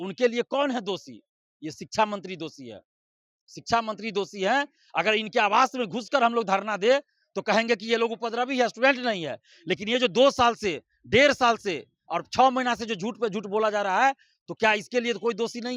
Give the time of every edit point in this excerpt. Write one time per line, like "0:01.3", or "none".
none